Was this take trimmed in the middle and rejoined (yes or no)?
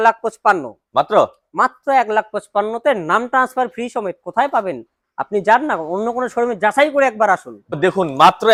no